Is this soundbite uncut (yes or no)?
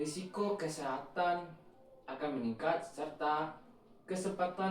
yes